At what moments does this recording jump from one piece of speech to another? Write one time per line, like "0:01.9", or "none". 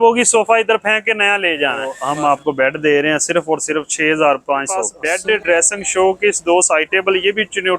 0:02.0
0:05.0

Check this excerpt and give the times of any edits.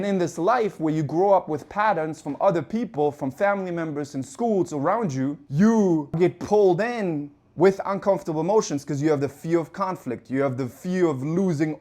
0:05.4
0:06.2

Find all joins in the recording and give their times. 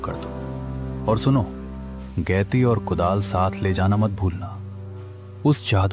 none

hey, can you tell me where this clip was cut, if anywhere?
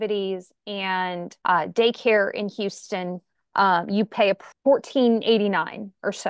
0:01.3
0:04.5

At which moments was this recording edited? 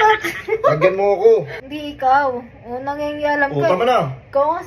0:01.6

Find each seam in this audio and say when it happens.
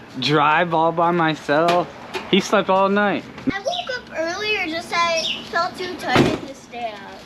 0:03.5

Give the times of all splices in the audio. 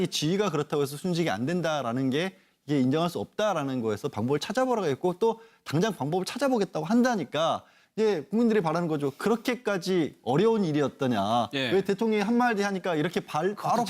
0:11.2

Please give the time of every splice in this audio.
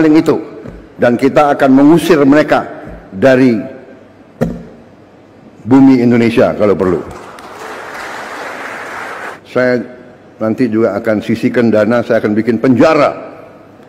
0:09.3

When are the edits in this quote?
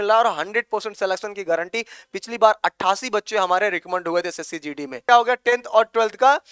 0:05.0

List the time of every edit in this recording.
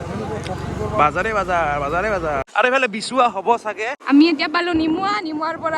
0:02.5
0:03.9

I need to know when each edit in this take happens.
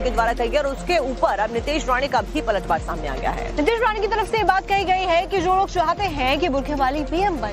none

